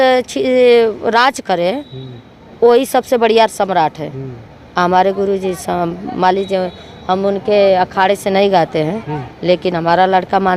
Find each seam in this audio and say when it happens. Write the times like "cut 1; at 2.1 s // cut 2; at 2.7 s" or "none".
none